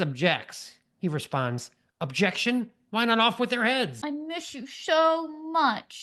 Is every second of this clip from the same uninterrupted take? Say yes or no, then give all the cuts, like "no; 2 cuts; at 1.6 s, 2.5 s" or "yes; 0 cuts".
no; 1 cut; at 4.0 s